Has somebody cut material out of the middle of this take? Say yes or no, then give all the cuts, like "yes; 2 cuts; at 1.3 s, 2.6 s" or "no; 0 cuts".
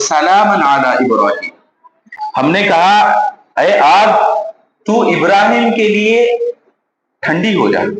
no; 0 cuts